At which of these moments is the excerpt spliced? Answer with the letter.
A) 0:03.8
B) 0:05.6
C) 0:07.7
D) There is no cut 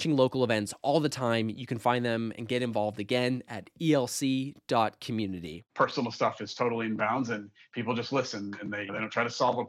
B